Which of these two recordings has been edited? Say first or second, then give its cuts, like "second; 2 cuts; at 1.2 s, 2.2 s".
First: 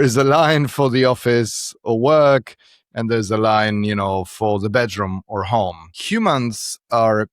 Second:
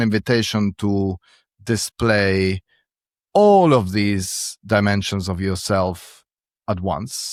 first; 1 cut; at 5.9 s